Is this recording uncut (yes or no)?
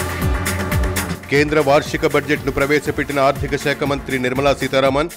no